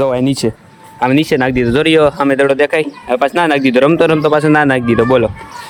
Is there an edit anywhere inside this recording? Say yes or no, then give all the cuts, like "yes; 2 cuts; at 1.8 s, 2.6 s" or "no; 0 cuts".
no; 0 cuts